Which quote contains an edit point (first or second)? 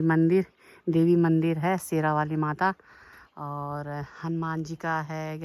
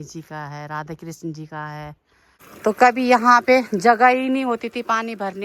second